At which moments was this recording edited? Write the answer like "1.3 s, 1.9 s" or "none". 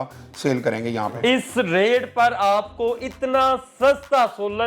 1.2 s